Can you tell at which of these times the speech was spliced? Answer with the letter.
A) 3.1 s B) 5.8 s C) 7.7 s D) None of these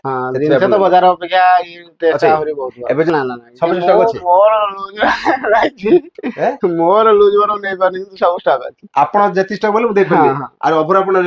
A